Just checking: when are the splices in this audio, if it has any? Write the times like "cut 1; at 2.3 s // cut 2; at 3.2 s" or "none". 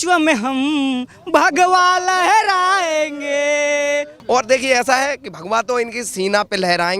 cut 1; at 4.1 s